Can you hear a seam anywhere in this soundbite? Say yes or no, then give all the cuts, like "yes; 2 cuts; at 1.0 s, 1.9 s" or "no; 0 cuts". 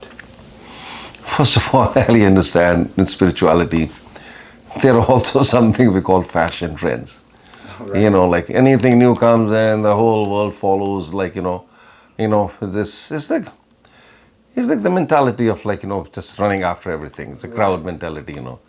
no; 0 cuts